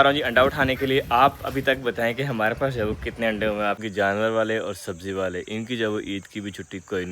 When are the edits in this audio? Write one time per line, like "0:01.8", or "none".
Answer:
0:03.8